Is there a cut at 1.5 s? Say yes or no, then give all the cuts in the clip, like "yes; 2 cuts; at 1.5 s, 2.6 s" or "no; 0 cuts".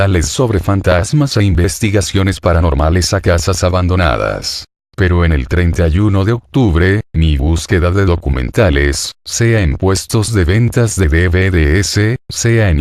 yes; 1 cut; at 1.5 s